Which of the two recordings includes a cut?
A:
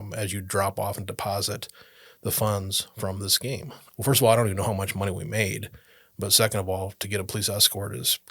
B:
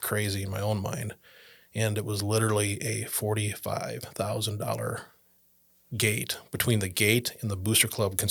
A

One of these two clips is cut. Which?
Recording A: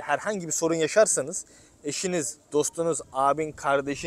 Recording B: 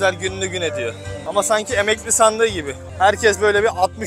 B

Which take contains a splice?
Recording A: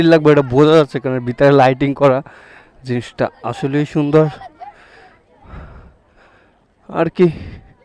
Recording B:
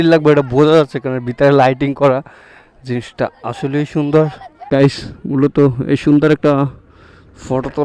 B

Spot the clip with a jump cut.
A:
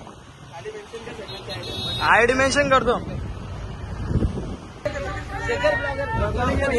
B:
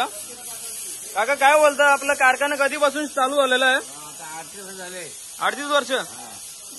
A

